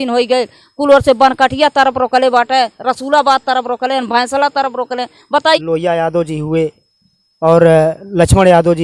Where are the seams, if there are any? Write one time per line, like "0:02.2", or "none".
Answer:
0:05.5